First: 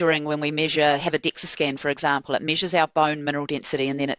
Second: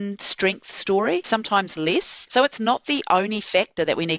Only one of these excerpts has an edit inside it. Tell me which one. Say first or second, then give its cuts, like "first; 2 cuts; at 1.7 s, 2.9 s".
second; 2 cuts; at 1.2 s, 2.2 s